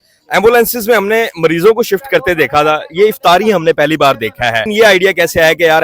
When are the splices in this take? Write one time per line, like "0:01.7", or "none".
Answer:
0:04.7